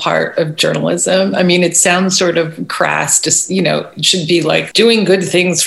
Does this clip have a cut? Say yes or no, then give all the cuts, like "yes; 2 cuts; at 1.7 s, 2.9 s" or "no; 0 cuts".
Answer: yes; 1 cut; at 4.7 s